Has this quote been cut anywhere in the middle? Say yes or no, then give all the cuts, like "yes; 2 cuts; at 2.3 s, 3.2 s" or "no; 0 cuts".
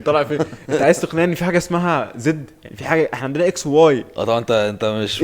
no; 0 cuts